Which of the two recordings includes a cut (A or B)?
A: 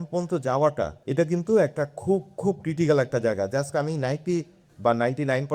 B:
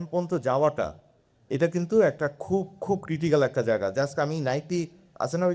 A